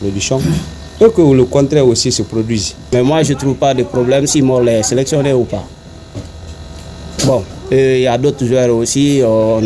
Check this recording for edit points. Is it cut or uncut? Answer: cut